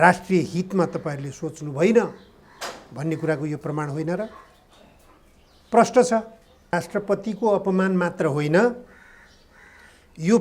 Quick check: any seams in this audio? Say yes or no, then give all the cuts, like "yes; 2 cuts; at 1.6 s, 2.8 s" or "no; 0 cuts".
yes; 1 cut; at 6.7 s